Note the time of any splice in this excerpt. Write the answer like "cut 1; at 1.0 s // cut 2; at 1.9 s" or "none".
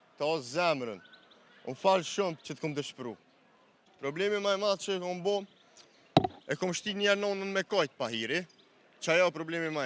cut 1; at 3.8 s